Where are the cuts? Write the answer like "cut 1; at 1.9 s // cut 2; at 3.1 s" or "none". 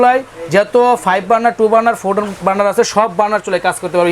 none